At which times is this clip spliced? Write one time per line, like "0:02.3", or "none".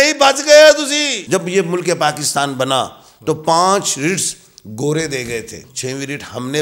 0:01.2
0:05.6